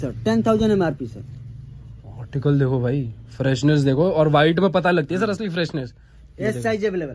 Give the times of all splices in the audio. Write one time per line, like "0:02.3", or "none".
none